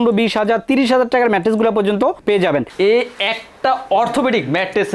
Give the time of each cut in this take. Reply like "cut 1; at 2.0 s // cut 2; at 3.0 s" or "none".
cut 1; at 2.7 s